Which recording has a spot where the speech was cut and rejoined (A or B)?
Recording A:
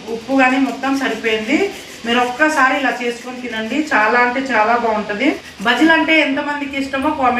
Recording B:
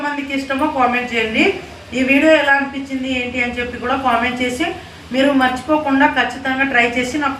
A